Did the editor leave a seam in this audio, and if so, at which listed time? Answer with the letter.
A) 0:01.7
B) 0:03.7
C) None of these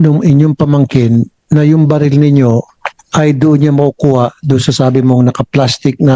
C